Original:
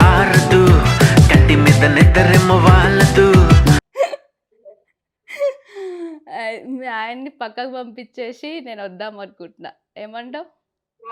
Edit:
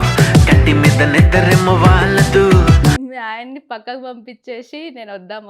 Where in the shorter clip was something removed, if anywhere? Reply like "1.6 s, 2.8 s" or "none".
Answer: 3.0 s

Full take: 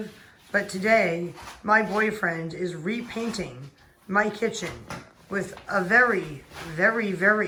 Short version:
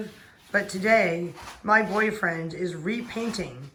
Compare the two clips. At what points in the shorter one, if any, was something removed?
none

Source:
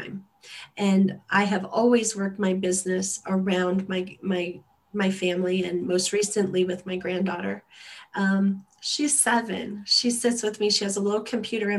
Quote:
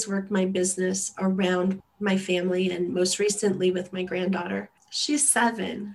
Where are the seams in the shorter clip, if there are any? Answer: 1.8 s, 4.9 s

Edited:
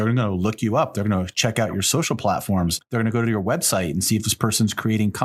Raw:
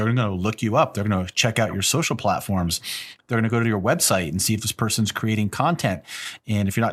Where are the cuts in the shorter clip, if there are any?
2.8 s

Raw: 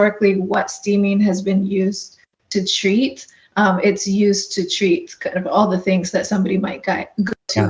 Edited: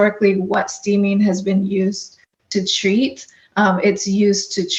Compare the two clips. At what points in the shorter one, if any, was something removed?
none

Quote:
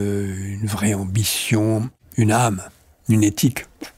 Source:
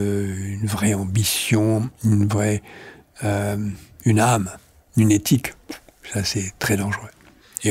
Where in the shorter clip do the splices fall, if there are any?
1.9 s

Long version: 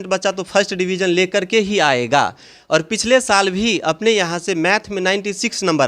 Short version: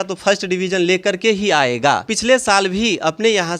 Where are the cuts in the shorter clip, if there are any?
2.1 s

